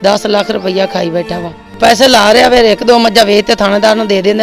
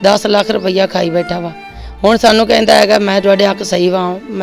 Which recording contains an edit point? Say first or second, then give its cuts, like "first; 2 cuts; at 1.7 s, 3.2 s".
first; 1 cut; at 1.8 s